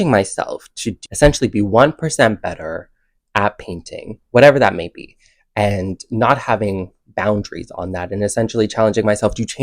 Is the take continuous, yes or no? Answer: no